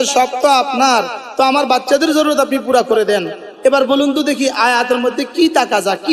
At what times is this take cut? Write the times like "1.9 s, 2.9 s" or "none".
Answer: none